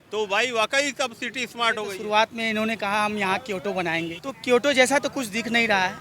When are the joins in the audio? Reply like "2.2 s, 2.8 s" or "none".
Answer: 2.0 s, 4.2 s